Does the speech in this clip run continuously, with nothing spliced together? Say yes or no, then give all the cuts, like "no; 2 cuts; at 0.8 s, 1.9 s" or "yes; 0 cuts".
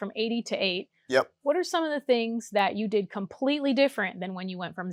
yes; 0 cuts